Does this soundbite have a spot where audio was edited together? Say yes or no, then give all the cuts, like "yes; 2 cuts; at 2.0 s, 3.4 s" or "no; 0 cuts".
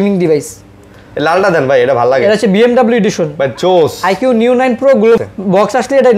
yes; 1 cut; at 5.2 s